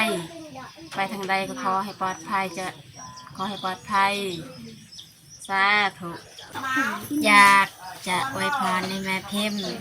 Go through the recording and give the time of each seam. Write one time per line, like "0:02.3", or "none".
0:06.5